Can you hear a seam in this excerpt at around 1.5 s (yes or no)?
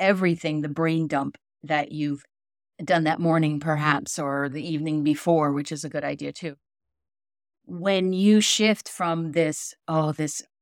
yes